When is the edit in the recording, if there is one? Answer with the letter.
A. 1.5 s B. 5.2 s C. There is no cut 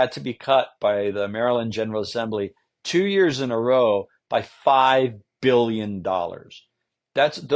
C